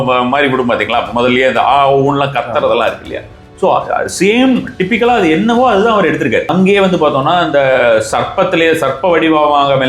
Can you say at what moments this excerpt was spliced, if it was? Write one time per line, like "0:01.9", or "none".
0:06.5